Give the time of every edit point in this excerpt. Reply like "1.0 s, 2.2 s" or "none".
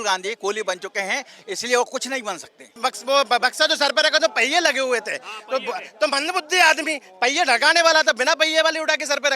2.8 s